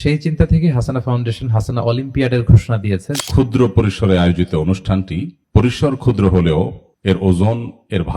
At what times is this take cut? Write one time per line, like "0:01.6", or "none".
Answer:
0:03.2